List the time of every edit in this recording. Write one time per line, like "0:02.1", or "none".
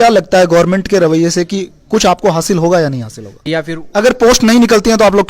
0:03.4